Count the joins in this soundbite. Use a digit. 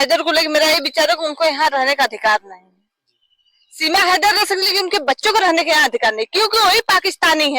0